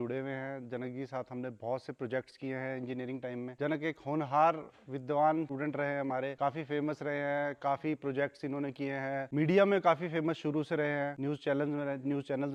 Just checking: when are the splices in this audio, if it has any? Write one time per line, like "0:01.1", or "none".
none